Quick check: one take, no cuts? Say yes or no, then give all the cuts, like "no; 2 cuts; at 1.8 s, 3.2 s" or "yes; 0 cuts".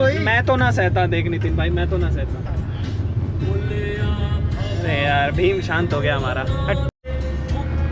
yes; 0 cuts